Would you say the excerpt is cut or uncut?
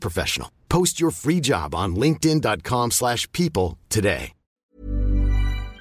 cut